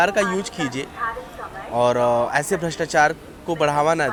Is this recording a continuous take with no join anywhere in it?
yes; 0 cuts

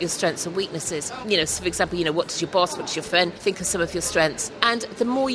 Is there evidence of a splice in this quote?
yes; 3 cuts; at 1.1 s, 3.4 s, 4.5 s

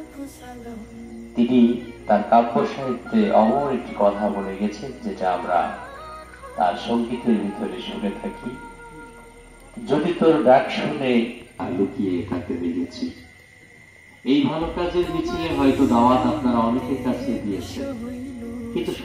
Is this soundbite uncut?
no; 1 cut; at 0.9 s

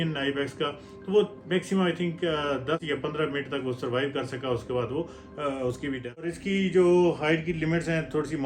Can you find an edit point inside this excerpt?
yes; 2 cuts; at 2.8 s, 6.2 s

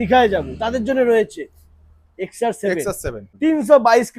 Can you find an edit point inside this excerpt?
yes; 1 cut; at 3.2 s

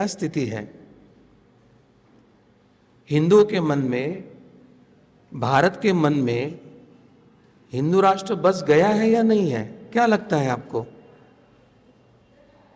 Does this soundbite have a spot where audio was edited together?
no; 0 cuts

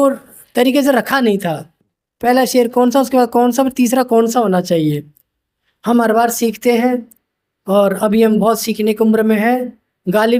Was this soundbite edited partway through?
no; 0 cuts

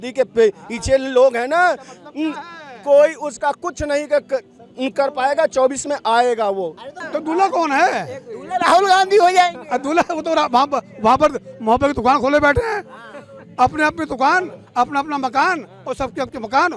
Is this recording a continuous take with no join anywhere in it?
yes; 0 cuts

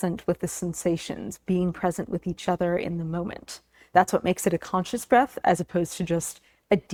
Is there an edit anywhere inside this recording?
no; 0 cuts

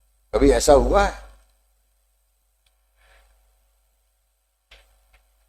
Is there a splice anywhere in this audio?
no; 0 cuts

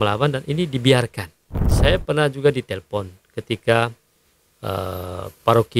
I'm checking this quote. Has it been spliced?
yes; 1 cut; at 1.7 s

